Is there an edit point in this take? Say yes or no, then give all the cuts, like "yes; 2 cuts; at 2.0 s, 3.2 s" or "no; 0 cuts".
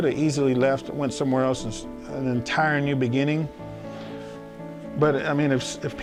no; 0 cuts